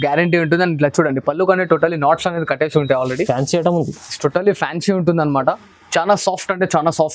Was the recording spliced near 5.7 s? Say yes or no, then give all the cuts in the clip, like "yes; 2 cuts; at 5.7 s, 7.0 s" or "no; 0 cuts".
yes; 1 cut; at 5.7 s